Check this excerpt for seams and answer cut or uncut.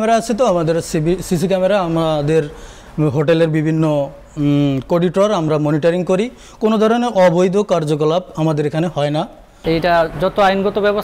cut